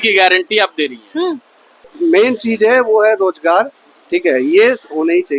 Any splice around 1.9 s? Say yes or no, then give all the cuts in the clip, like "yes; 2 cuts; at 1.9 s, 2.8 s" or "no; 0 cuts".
yes; 1 cut; at 1.9 s